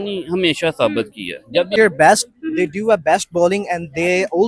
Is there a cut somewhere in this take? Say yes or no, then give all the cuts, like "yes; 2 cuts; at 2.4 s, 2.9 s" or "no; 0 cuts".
yes; 1 cut; at 1.8 s